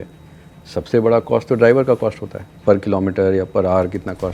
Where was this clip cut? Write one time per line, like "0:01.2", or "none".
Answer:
none